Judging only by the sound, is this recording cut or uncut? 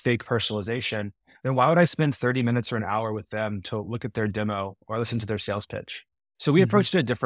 uncut